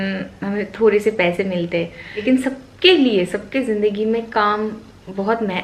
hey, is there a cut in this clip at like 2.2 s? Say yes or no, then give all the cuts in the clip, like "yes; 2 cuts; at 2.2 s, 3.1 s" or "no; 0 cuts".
yes; 1 cut; at 2.2 s